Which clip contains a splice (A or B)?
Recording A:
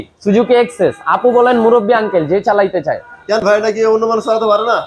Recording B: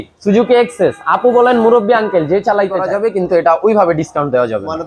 B